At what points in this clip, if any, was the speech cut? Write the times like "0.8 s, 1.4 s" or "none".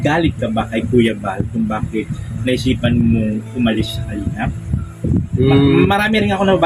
none